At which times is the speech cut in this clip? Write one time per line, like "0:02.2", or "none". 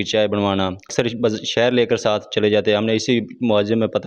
0:00.9